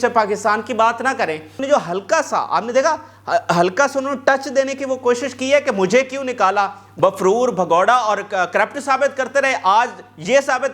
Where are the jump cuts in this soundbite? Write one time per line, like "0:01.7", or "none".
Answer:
0:01.6
0:06.9